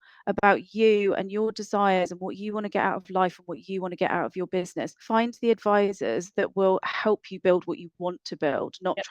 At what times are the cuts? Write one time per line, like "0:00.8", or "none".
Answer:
0:05.0